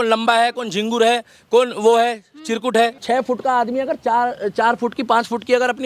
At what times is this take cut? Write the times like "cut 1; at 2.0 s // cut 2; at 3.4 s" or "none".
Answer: cut 1; at 3.0 s